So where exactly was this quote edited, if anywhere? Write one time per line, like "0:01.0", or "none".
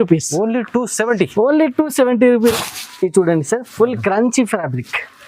0:02.5

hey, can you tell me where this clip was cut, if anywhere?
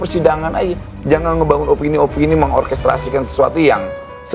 none

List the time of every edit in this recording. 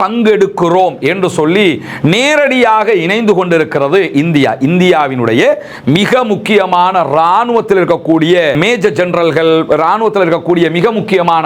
0:08.6

